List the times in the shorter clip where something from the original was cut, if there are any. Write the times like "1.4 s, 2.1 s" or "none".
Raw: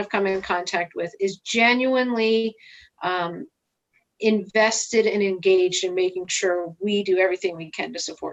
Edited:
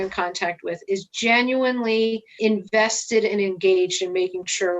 2.3 s

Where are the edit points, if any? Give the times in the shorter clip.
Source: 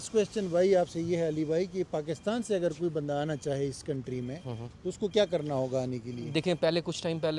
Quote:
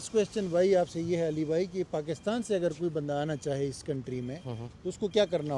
none

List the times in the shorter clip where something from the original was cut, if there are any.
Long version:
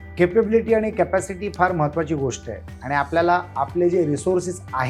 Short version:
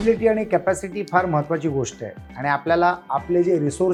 none

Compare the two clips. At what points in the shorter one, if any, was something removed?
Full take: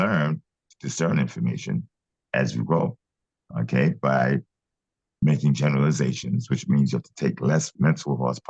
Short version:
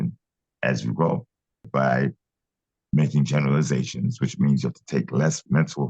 1.7 s

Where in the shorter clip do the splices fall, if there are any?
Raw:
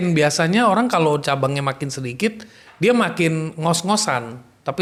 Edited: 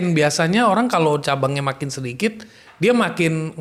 none

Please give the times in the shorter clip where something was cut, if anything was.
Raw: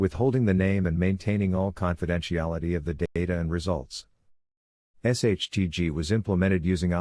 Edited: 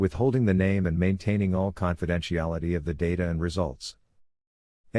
3.1 s

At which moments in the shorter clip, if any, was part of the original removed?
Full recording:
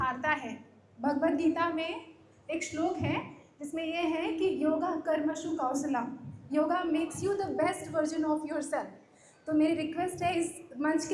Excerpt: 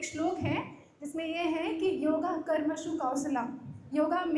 none

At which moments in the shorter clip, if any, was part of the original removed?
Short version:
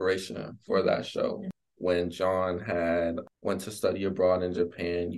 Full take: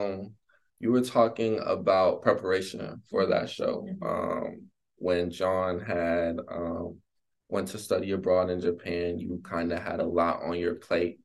1.5 s, 3.3 s

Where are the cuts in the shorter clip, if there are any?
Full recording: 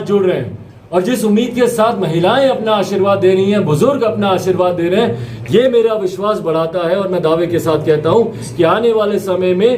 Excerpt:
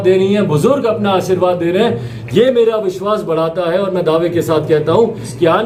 none

